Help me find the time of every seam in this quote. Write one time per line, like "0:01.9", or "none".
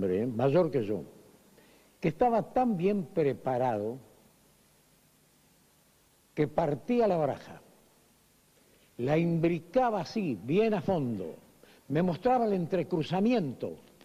0:13.0